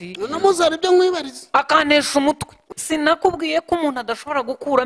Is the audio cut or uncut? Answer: cut